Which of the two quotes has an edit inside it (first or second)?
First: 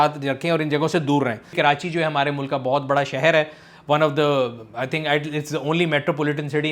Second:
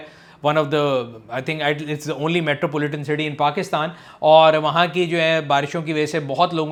first